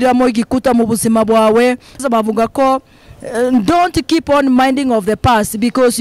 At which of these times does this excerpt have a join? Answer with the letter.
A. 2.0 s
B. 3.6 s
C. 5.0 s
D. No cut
A